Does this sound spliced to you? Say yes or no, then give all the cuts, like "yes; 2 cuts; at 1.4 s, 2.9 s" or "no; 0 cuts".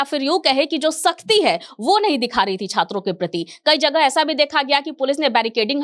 no; 0 cuts